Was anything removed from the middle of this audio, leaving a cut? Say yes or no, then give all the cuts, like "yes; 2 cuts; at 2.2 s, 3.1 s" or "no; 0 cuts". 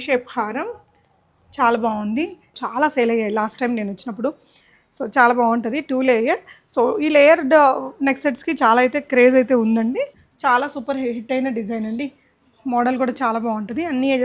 yes; 2 cuts; at 2.6 s, 10.2 s